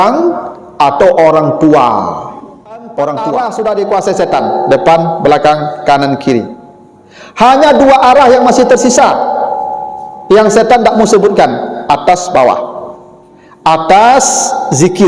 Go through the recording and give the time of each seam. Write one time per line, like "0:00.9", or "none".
0:03.4